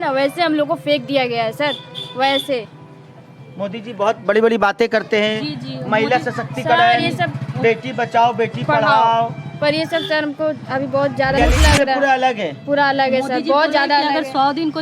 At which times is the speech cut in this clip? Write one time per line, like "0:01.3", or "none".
0:11.4